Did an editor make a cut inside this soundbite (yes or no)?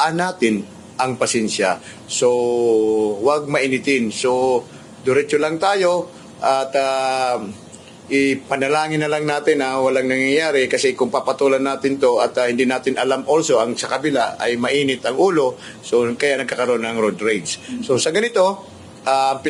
no